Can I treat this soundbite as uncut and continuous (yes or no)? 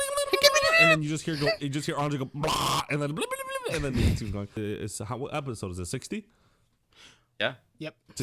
no